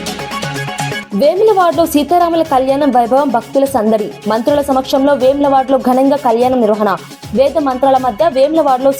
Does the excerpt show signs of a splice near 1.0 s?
yes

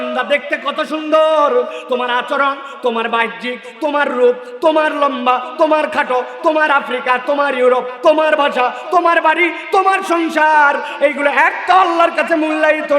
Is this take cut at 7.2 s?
no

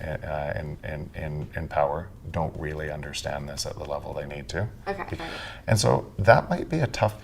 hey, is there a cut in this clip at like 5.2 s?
yes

